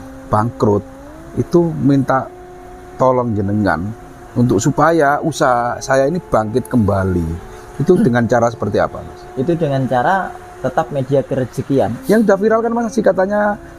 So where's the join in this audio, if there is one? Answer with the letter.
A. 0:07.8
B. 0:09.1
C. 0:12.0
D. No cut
C